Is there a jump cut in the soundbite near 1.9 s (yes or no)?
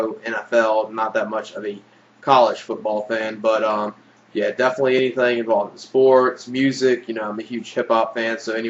no